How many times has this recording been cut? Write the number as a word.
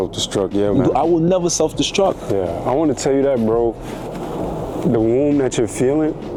zero